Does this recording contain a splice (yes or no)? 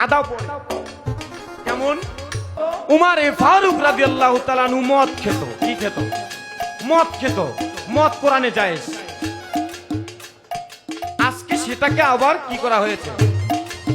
yes